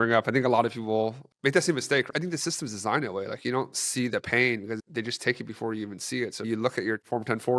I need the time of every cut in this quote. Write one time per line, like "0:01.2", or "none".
0:01.3
0:02.1
0:04.8
0:06.5